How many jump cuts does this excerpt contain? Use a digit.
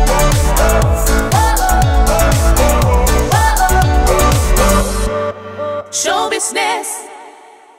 0